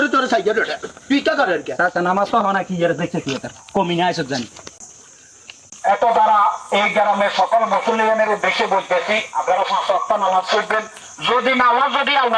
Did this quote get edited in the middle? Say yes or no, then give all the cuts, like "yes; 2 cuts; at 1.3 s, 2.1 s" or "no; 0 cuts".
no; 0 cuts